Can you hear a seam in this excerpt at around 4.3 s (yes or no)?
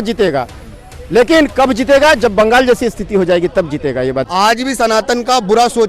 yes